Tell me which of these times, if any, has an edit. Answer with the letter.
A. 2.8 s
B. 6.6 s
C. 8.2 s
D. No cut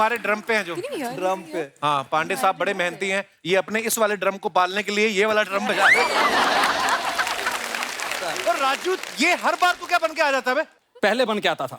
C